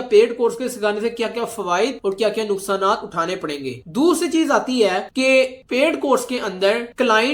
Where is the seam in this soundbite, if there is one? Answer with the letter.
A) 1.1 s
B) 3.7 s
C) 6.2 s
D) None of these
D